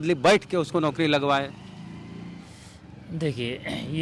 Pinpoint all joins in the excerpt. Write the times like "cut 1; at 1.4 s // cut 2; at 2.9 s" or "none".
none